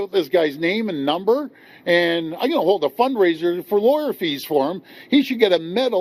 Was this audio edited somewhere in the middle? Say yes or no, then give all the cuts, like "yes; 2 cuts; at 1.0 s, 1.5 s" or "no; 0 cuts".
no; 0 cuts